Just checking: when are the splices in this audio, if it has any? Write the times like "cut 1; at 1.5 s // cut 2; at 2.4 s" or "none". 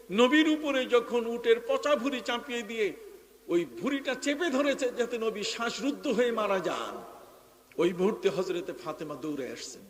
none